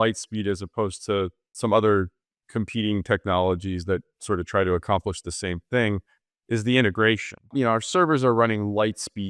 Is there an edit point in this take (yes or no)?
yes